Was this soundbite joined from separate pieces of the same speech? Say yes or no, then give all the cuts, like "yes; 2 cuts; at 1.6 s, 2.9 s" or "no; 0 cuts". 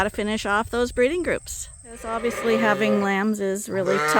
yes; 1 cut; at 2.1 s